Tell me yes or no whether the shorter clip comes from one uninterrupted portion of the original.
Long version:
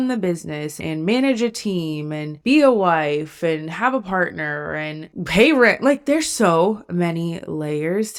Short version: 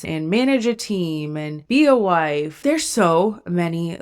no